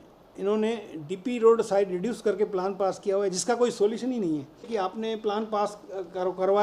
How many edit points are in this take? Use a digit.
1